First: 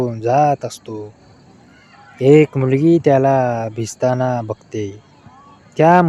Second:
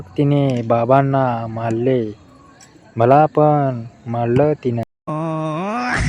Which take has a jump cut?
second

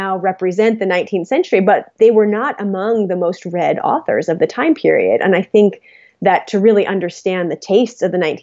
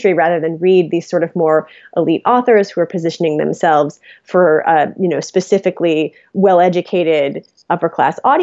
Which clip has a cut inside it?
first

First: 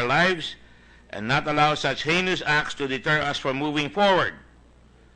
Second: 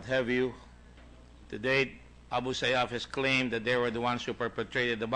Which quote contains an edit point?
second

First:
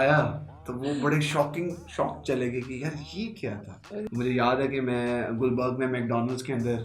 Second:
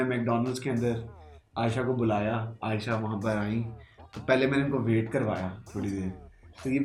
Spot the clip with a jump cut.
first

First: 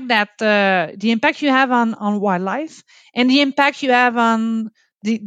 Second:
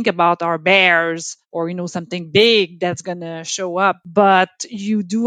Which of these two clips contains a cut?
second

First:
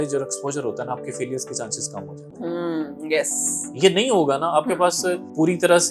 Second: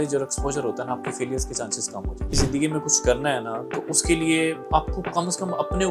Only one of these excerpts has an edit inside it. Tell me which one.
second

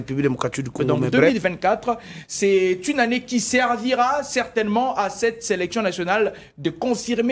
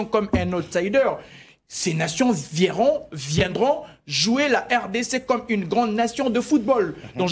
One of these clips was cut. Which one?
first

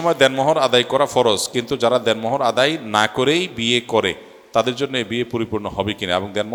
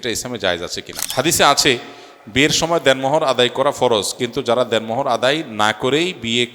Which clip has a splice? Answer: second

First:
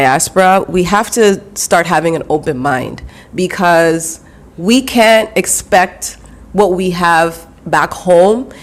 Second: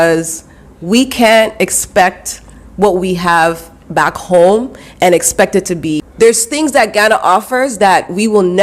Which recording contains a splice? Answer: second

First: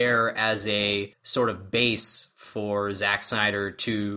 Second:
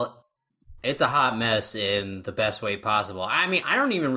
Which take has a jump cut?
first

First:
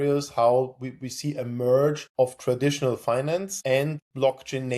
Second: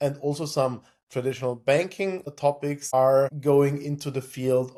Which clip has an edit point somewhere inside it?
first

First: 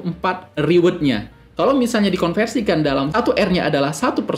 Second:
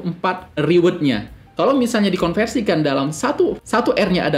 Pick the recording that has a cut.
first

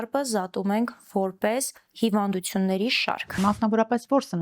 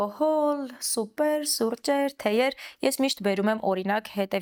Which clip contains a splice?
first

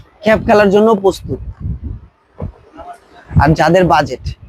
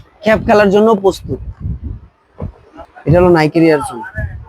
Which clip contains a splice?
second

